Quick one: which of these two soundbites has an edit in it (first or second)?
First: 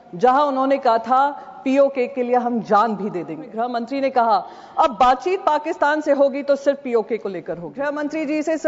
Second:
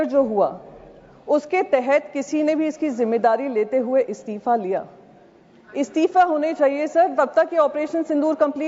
first